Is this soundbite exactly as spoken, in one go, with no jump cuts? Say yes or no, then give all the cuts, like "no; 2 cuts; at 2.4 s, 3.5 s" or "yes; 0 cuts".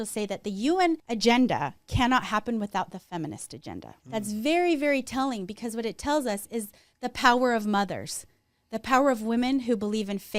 no; 2 cuts; at 1.1 s, 3.9 s